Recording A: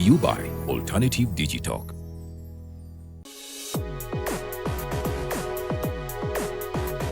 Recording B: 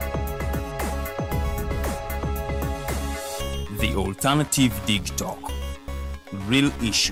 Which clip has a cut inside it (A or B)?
A